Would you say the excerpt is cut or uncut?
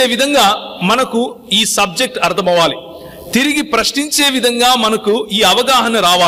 uncut